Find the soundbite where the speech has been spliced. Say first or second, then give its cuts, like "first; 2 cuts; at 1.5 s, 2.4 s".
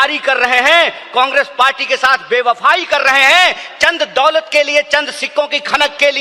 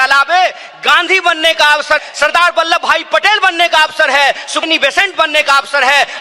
second; 2 cuts; at 2.0 s, 4.6 s